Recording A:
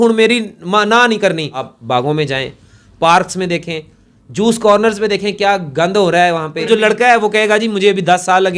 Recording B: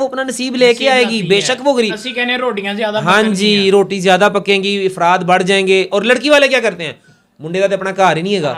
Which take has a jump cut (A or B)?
A